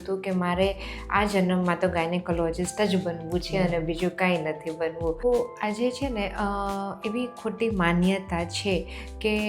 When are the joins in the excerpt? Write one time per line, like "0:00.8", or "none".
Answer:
0:05.2